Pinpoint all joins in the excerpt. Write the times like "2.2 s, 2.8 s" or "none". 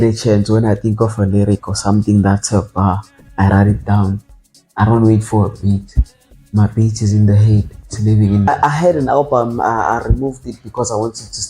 8.5 s